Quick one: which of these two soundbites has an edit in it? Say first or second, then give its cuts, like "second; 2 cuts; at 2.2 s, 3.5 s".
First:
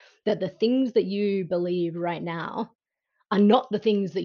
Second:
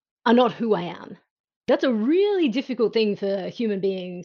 second; 1 cut; at 1.6 s